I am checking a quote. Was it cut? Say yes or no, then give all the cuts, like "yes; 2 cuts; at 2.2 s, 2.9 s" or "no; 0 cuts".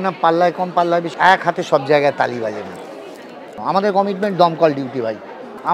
yes; 2 cuts; at 1.1 s, 3.5 s